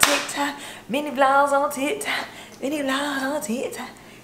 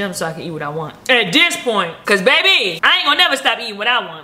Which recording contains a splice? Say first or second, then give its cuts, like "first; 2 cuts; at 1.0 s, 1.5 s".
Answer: second; 3 cuts; at 0.9 s, 2.0 s, 2.8 s